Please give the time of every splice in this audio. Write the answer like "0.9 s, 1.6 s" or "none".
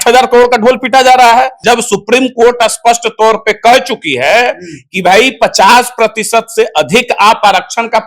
1.6 s